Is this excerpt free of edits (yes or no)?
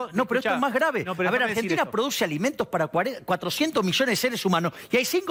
yes